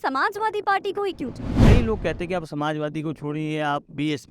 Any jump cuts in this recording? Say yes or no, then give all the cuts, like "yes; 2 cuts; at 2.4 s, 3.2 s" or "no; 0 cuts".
yes; 1 cut; at 1.5 s